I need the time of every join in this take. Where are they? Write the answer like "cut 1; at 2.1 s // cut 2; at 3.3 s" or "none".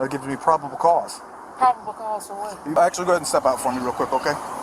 cut 1; at 2.8 s